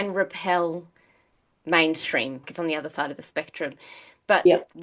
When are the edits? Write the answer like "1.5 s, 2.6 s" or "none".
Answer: 2.4 s